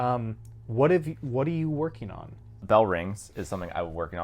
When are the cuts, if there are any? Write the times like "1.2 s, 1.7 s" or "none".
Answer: 2.6 s